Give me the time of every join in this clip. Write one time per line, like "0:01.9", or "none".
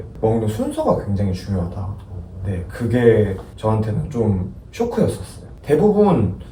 none